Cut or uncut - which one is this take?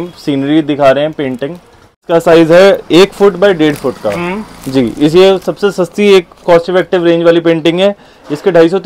cut